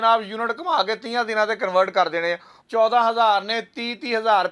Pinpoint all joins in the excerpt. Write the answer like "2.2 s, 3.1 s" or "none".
2.5 s